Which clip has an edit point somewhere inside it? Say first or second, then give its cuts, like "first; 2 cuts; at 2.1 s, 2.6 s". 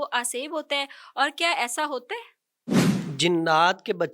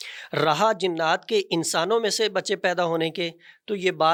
first; 1 cut; at 2.8 s